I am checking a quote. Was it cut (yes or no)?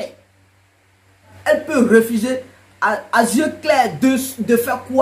yes